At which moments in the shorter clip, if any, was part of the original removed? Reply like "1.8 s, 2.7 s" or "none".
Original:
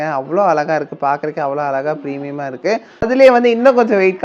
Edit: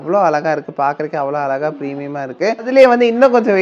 2.6 s